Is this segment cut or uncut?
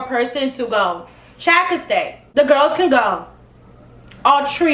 cut